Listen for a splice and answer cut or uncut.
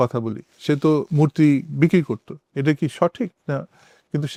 uncut